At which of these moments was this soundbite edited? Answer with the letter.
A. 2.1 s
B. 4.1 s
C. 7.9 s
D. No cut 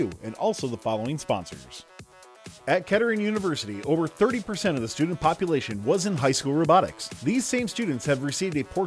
A